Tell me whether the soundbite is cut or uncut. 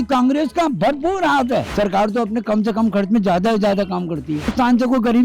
cut